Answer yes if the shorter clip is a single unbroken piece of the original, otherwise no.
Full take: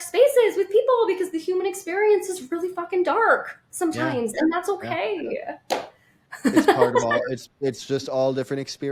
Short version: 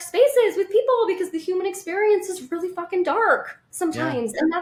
yes